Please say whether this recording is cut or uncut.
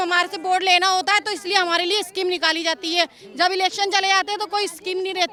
uncut